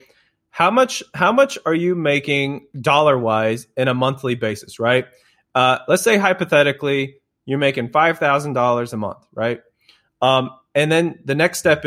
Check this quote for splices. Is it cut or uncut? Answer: uncut